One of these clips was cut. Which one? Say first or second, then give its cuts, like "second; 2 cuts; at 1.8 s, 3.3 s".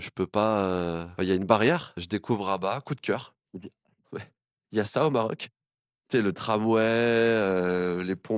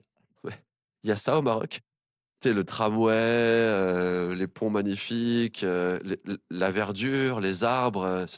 first; 2 cuts; at 1.1 s, 2.5 s